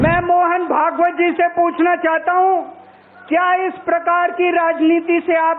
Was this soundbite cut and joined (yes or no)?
no